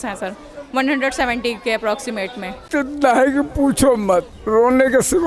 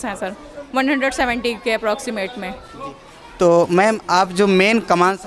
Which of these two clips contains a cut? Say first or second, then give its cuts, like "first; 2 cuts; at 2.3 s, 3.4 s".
first; 2 cuts; at 2.6 s, 4.4 s